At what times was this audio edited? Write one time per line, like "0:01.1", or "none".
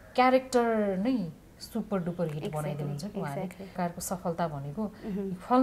0:03.8

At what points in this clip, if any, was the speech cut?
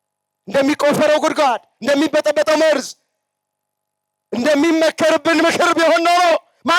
none

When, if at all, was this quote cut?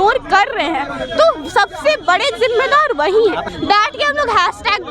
0:03.4

